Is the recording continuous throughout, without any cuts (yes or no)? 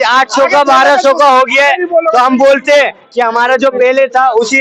yes